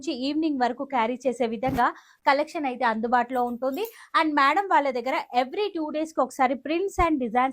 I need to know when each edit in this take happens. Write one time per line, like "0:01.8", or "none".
none